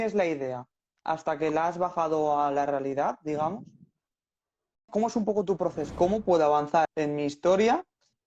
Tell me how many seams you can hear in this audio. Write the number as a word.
three